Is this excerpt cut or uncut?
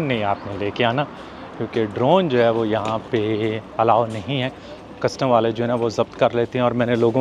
uncut